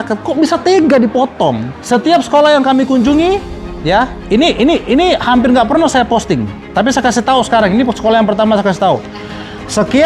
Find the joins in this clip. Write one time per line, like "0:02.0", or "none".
0:01.7